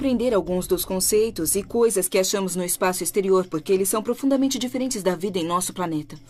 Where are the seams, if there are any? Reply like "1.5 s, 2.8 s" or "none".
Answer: none